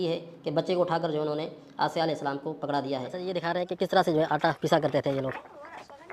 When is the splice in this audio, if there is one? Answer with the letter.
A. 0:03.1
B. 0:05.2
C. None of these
A